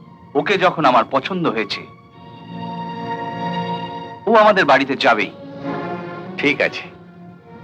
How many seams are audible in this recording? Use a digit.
0